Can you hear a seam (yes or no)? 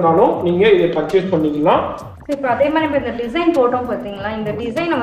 yes